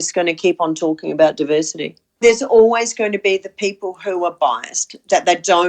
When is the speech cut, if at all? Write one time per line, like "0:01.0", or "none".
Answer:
0:02.2